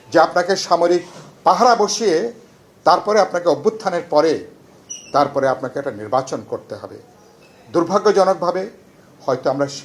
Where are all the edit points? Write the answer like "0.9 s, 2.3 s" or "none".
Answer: none